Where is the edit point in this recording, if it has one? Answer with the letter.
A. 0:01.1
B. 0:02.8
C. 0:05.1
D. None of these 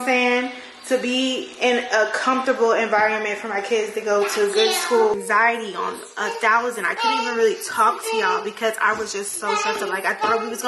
C